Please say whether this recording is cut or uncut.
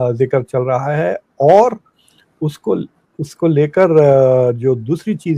uncut